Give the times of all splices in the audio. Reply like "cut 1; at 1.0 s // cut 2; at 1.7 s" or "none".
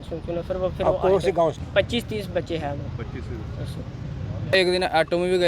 cut 1; at 1.6 s // cut 2; at 4.5 s